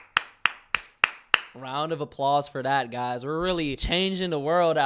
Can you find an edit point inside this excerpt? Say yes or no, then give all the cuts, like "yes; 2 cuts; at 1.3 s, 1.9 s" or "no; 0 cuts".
yes; 1 cut; at 3.8 s